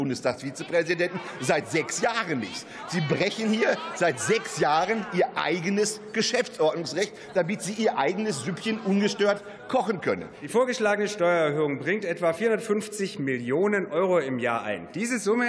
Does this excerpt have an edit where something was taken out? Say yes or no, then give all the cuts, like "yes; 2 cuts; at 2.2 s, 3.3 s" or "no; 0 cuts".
yes; 1 cut; at 10.3 s